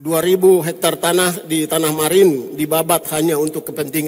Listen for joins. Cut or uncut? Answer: uncut